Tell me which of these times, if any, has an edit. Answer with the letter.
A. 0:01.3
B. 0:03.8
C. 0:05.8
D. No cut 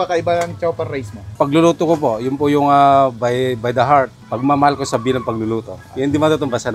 A